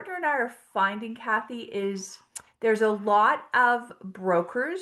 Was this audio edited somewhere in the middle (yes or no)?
no